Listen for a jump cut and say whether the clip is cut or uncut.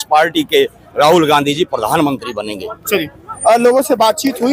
uncut